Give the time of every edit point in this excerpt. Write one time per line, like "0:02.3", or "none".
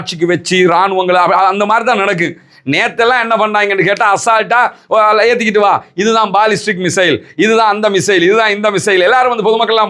none